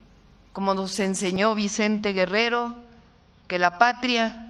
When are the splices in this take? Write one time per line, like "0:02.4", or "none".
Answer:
none